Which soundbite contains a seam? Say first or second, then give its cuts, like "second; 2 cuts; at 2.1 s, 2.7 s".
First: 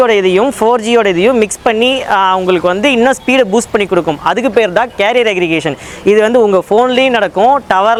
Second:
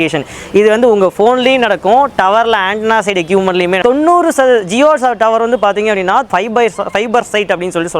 second; 2 cuts; at 3.8 s, 6.3 s